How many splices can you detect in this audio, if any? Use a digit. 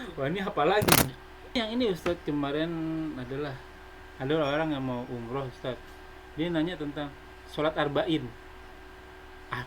1